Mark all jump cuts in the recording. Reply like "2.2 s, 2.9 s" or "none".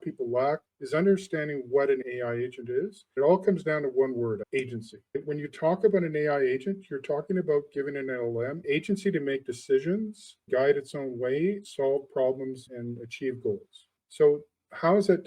2.0 s